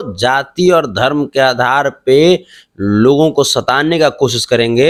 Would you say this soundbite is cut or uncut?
uncut